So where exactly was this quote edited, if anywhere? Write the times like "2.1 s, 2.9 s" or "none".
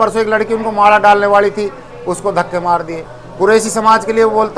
none